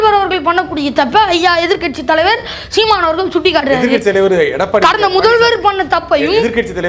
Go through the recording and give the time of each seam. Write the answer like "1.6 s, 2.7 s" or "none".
none

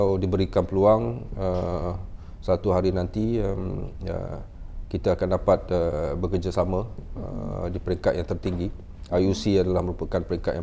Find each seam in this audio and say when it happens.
none

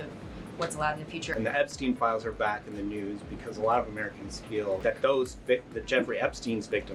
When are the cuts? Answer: 1.3 s, 4.8 s

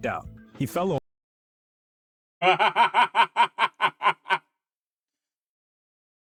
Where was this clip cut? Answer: none

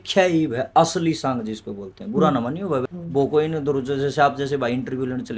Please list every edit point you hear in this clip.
2.8 s

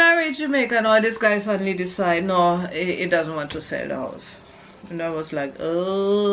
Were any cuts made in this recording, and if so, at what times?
none

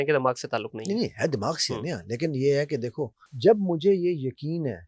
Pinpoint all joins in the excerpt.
3.2 s

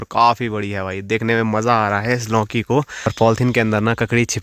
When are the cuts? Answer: 3.1 s

